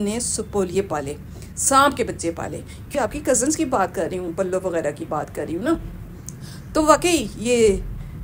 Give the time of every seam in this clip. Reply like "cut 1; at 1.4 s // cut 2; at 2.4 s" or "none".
cut 1; at 2.9 s